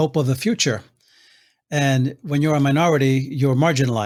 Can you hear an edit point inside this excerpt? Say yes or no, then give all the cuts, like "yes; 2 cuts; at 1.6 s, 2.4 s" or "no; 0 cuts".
no; 0 cuts